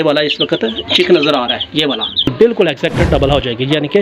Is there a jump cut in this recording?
yes; 1 cut; at 2.3 s

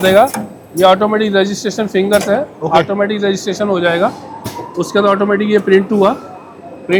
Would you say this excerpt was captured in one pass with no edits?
yes; 0 cuts

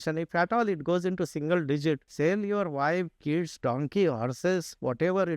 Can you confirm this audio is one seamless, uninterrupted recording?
no; 1 cut; at 2.1 s

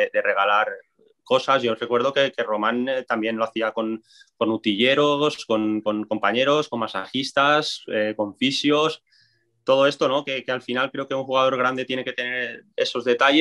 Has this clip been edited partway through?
no; 0 cuts

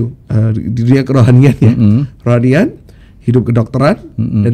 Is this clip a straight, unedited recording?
yes; 0 cuts

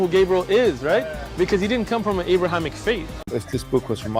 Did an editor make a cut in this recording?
yes; 1 cut; at 3.2 s

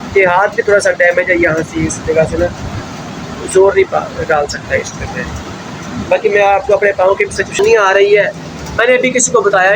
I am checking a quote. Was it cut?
yes; 1 cut; at 7.5 s

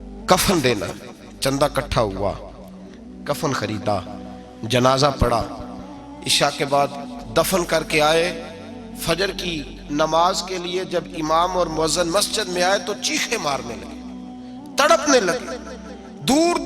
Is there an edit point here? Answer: no; 0 cuts

